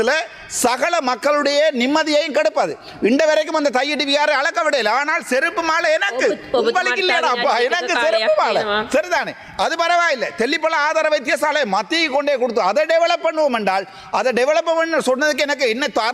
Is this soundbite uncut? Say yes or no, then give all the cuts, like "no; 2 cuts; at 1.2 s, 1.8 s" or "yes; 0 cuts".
yes; 0 cuts